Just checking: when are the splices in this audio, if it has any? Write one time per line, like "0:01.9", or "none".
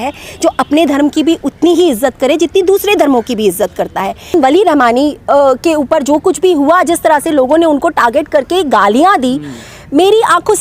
0:04.3